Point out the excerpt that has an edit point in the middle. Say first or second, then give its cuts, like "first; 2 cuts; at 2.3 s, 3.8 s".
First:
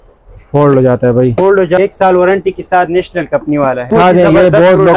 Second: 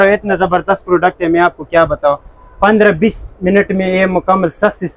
first; 2 cuts; at 1.8 s, 3.9 s